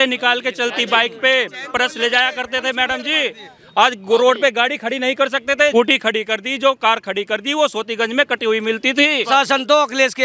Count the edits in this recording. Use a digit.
2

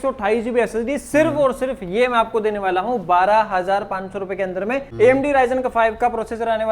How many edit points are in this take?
1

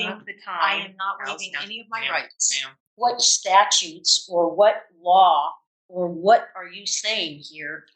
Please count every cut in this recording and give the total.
1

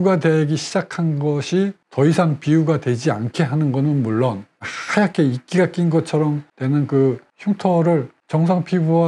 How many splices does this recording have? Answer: 1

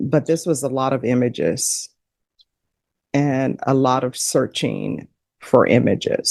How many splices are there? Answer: 0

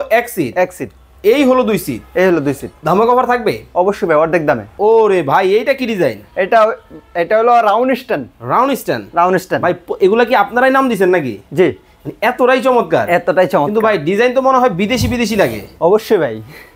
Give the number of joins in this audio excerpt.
1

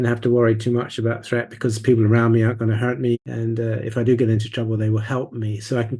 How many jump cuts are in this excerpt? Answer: 1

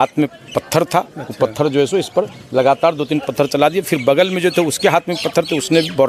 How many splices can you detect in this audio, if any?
0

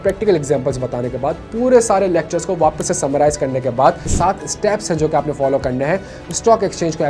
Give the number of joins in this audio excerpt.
1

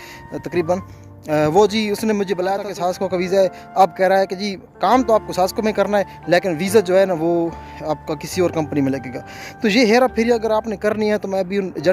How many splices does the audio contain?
1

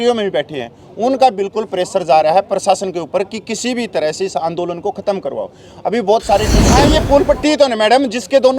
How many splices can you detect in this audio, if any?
1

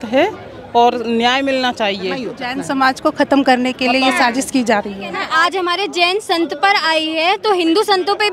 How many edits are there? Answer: 2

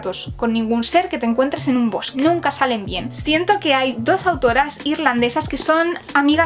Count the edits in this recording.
1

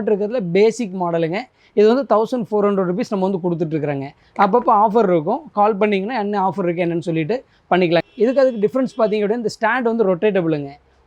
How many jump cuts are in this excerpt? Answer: 1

